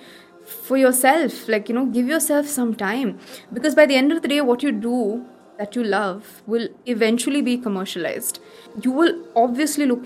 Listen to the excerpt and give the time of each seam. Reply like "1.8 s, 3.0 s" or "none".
8.7 s

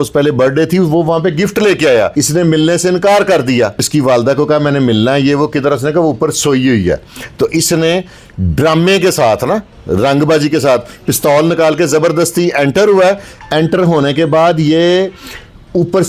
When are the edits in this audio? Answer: 2.1 s, 3.9 s

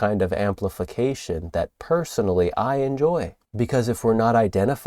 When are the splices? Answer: 3.4 s

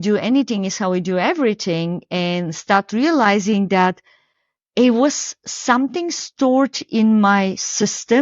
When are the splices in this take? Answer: none

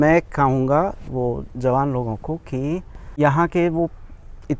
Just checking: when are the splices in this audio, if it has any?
3.0 s

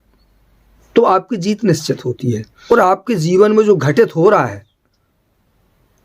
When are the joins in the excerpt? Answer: 2.7 s

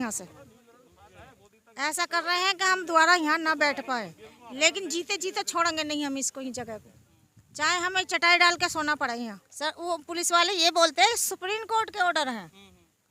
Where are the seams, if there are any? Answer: 9.4 s

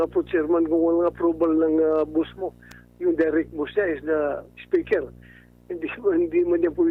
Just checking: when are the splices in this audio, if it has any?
none

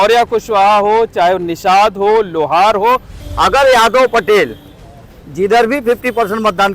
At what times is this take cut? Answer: 3.2 s

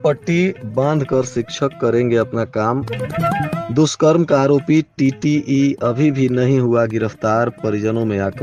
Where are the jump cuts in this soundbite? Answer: none

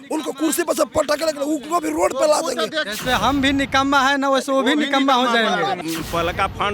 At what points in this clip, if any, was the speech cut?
2.8 s, 5.8 s

